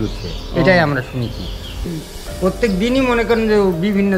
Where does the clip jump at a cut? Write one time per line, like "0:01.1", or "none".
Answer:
0:01.9